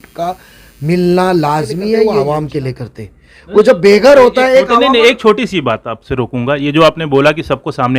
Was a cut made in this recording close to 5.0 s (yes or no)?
no